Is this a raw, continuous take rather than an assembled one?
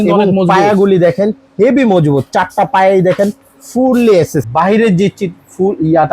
no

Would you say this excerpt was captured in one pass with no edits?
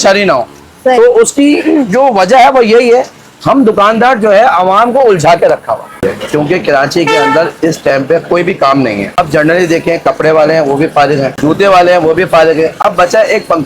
no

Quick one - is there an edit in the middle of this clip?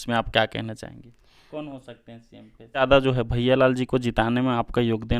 yes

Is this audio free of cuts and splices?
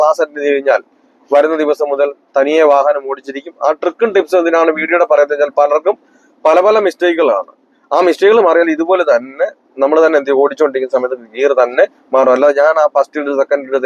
yes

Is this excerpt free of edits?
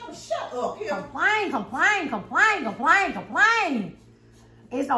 yes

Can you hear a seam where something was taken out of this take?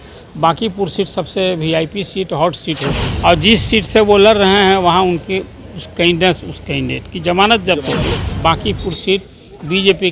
yes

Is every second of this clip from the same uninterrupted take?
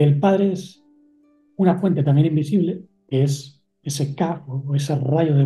no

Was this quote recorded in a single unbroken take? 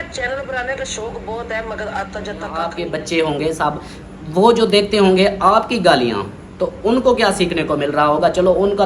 no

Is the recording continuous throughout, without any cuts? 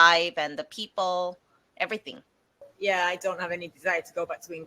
no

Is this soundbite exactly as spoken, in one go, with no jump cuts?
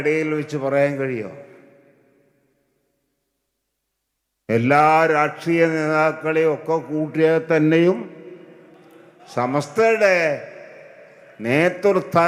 yes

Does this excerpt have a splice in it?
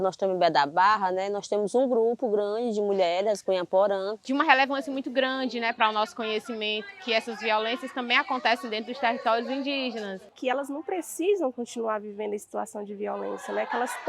yes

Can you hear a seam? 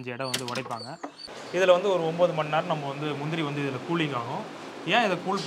yes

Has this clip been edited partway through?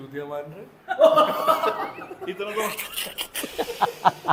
no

